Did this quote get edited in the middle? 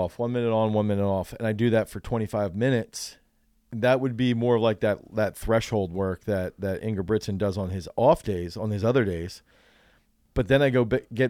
no; 0 cuts

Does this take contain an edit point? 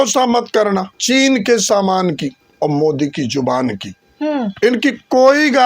yes; 2 cuts; at 0.9 s, 2.4 s

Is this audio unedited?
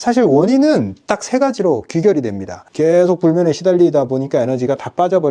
no; 1 cut; at 2.6 s

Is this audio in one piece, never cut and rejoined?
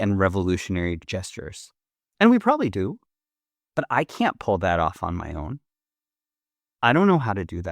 no; 1 cut; at 1.1 s

